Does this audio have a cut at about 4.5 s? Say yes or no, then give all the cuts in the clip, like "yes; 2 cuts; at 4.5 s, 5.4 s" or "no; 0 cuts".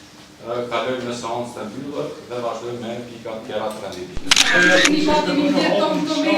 yes; 1 cut; at 4.5 s